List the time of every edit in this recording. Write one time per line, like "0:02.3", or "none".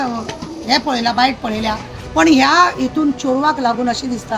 0:01.9